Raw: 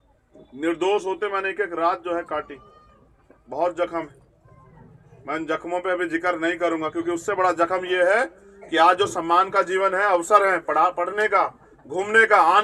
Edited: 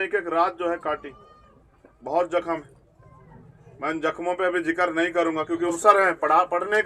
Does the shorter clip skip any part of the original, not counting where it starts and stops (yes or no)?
yes